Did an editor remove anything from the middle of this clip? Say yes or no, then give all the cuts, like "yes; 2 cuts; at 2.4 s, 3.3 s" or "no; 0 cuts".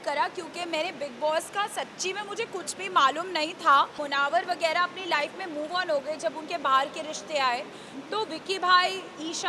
yes; 1 cut; at 4.0 s